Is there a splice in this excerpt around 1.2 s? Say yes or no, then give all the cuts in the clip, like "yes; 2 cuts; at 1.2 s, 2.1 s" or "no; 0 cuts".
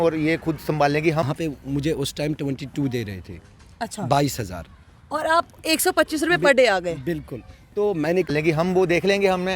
yes; 2 cuts; at 1.2 s, 8.3 s